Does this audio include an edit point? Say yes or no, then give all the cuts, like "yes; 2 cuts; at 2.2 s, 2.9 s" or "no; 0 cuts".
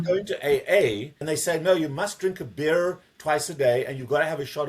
yes; 1 cut; at 1.1 s